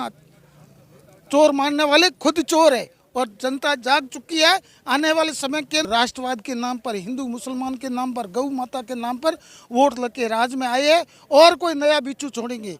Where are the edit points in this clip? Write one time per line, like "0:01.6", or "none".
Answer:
0:05.9